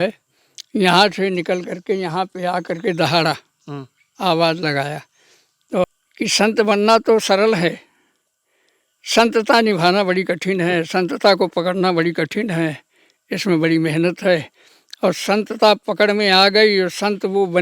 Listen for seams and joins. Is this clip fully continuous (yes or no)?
no